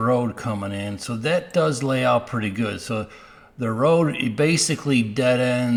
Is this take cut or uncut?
uncut